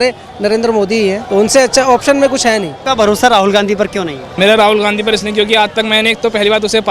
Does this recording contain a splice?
yes; 3 cuts; at 1.2 s, 2.8 s, 4.2 s

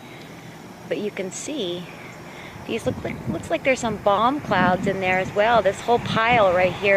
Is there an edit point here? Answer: yes; 1 cut; at 5.3 s

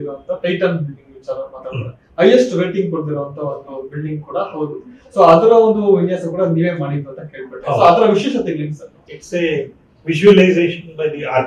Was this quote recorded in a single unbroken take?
yes; 0 cuts

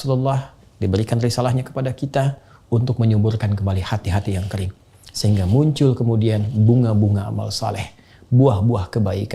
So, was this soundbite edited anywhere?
no; 0 cuts

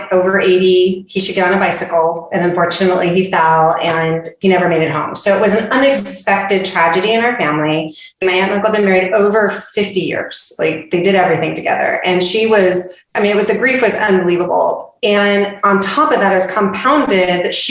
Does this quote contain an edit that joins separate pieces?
yes; 2 cuts; at 8.2 s, 13.1 s

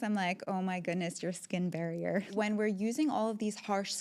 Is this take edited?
yes; 1 cut; at 2.3 s

